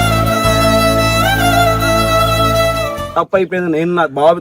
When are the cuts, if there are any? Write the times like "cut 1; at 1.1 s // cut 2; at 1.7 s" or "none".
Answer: cut 1; at 3.0 s